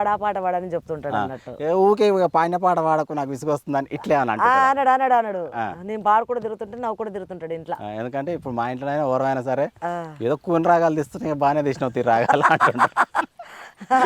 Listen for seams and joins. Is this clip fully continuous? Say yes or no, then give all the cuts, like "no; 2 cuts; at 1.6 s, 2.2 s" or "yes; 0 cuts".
yes; 0 cuts